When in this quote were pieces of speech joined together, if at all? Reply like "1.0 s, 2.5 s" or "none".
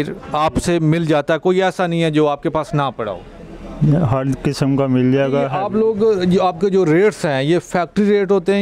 5.6 s